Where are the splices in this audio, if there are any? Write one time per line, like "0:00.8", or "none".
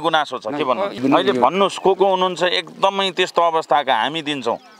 0:01.0